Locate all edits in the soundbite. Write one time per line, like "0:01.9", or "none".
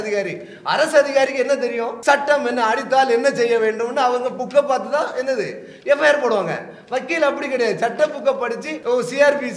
0:01.9
0:08.7

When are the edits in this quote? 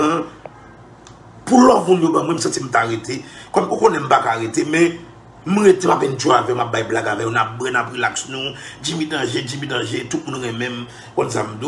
0:07.7

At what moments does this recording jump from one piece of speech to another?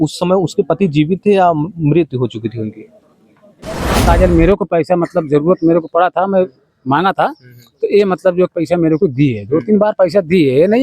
0:04.0

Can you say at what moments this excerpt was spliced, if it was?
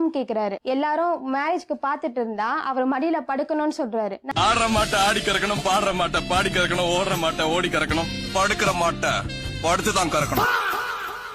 none

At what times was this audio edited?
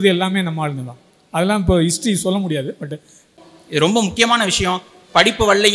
0:03.3

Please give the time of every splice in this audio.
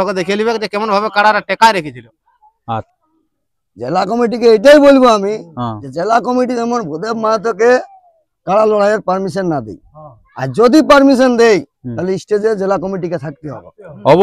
0:02.9

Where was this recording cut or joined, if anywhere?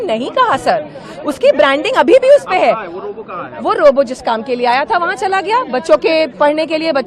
none

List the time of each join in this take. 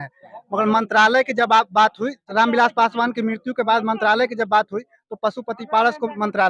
0:02.2

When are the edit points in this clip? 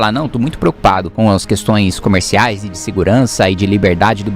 0:01.1

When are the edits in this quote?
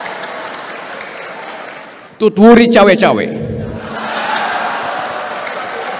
0:02.0

